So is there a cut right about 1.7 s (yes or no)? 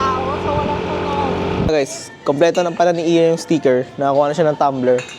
yes